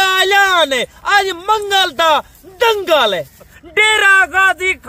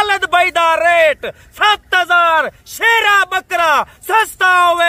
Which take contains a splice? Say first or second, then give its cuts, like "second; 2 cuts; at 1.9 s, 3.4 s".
first; 1 cut; at 3.6 s